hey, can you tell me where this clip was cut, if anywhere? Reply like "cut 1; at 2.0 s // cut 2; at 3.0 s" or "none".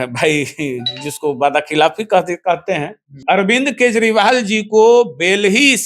cut 1; at 3.2 s

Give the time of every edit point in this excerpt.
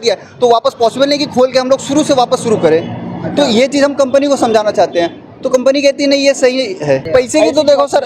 cut 1; at 7.0 s

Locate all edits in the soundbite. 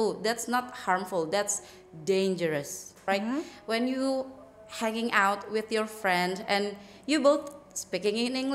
cut 1; at 3.0 s

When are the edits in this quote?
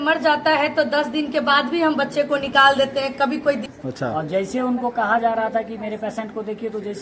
cut 1; at 3.6 s

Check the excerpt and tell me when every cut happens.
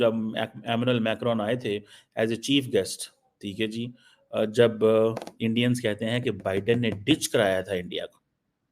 none

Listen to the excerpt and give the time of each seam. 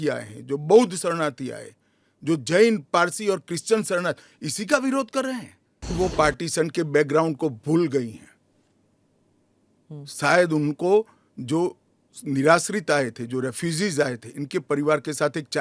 cut 1; at 5.9 s

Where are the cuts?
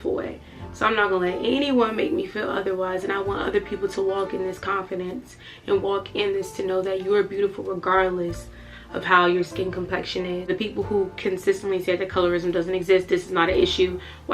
cut 1; at 10.5 s

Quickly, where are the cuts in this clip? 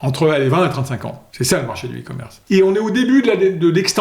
cut 1; at 1.2 s // cut 2; at 2.3 s

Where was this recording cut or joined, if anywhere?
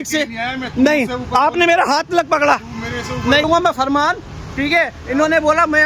cut 1; at 3.4 s

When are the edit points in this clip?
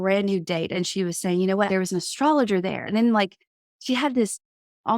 cut 1; at 0.7 s // cut 2; at 1.7 s // cut 3; at 2.9 s

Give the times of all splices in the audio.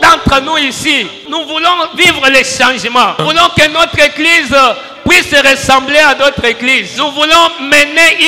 cut 1; at 1.2 s // cut 2; at 3.2 s // cut 3; at 6.9 s

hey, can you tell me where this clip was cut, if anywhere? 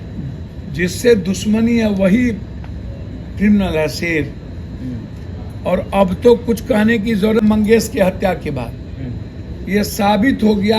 cut 1; at 7.4 s

